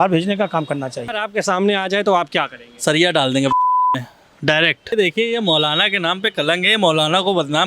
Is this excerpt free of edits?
no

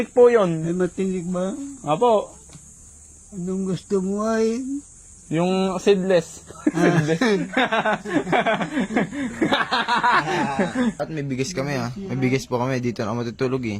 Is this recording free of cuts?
no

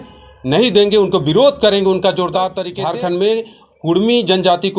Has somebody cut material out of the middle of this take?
yes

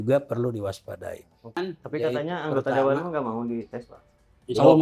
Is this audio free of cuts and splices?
no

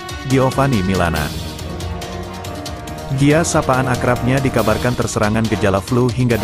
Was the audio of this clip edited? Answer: yes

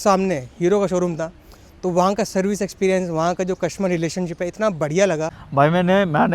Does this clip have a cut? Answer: yes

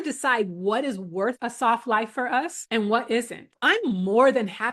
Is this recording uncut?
no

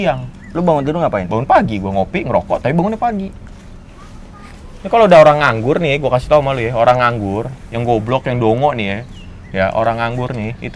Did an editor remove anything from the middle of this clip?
no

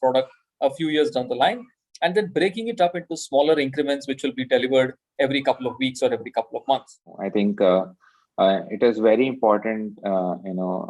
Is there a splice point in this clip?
yes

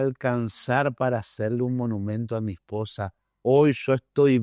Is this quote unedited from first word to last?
yes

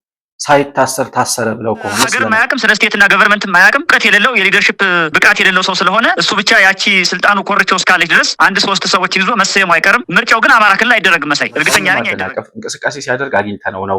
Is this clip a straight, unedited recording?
no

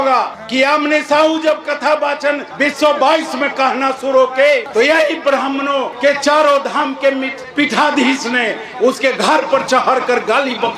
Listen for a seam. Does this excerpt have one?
no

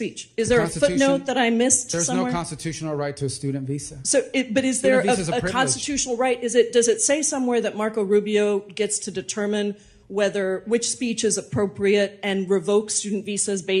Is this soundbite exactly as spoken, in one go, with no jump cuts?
yes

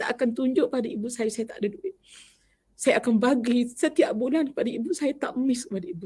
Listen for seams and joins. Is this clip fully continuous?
yes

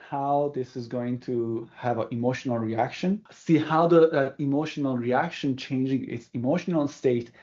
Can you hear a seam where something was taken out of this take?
yes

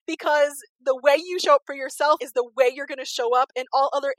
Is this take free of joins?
no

